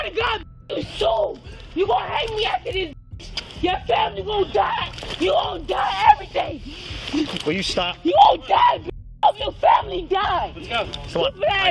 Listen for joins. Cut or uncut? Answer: uncut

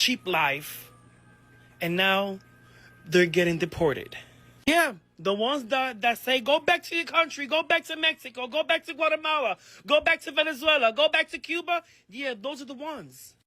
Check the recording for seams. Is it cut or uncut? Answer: uncut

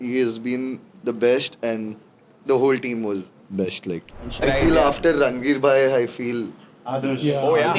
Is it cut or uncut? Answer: cut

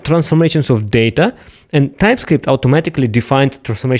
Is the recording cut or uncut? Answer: uncut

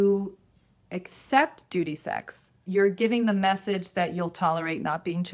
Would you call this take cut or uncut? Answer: uncut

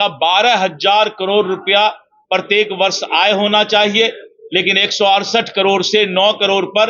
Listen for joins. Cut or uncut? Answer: uncut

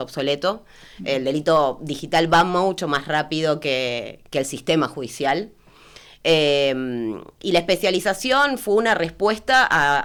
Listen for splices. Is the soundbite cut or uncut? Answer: uncut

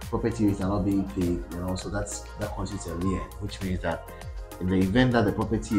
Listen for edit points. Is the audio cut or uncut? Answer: uncut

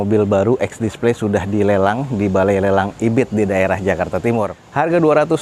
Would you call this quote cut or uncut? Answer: uncut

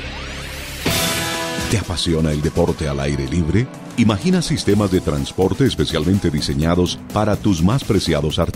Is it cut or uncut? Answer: cut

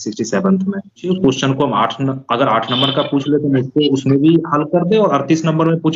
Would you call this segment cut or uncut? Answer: cut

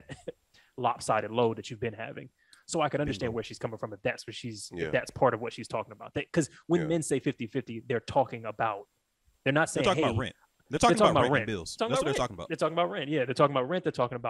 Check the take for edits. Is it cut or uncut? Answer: uncut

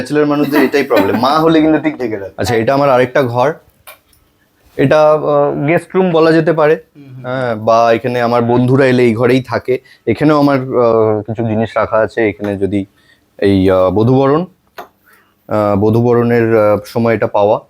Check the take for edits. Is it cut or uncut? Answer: cut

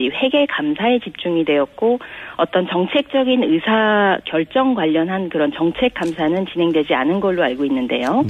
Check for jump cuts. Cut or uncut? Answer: uncut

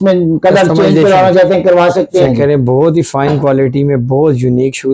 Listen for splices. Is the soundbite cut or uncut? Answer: cut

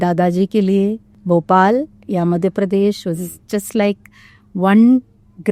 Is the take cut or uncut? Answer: cut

